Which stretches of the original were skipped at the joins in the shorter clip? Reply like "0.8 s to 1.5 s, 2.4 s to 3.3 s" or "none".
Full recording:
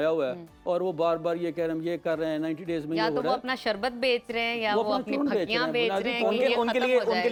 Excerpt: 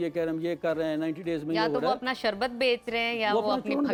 none